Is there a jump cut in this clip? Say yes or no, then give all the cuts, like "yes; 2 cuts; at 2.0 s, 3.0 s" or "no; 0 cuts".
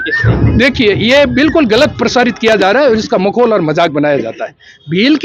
no; 0 cuts